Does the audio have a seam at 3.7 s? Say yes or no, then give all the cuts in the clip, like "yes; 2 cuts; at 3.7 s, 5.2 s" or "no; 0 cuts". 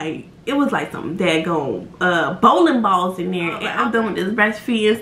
yes; 1 cut; at 3.7 s